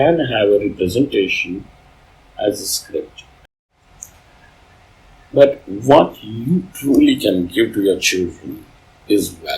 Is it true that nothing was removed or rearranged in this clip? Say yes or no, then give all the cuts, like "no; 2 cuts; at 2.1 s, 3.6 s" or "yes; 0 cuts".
no; 1 cut; at 3.2 s